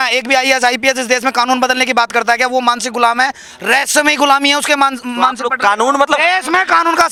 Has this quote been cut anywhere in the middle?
no; 0 cuts

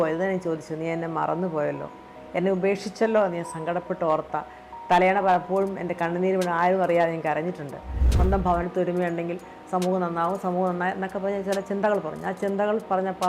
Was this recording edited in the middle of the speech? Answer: yes; 1 cut; at 8.0 s

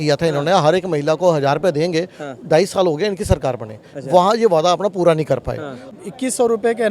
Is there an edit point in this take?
yes; 1 cut; at 6.0 s

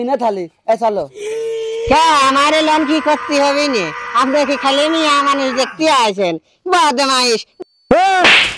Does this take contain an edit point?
yes; 1 cut; at 7.5 s

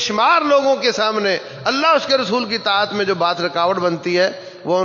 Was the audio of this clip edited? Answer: no; 0 cuts

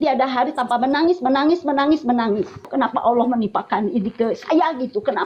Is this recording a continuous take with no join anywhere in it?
no; 1 cut; at 2.6 s

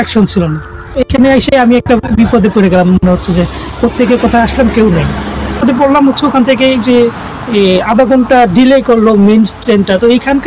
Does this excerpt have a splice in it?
yes; 2 cuts; at 1.0 s, 5.6 s

